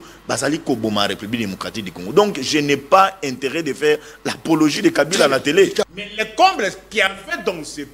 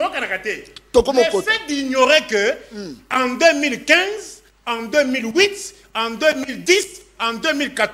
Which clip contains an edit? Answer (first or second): first